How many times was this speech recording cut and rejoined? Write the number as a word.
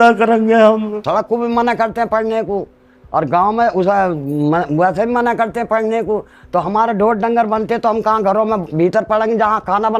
one